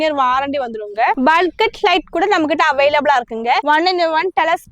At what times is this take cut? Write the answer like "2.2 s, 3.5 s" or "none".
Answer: 3.6 s